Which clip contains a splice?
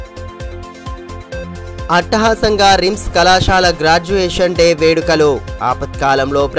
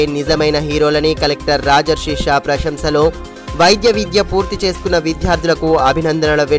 first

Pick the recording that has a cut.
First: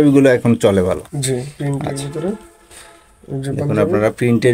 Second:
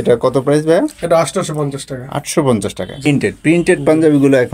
second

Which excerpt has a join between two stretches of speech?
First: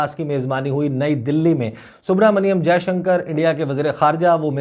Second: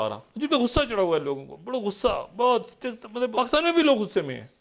second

